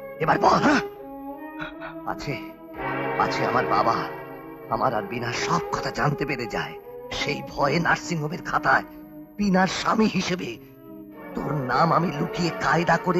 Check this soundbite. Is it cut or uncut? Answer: uncut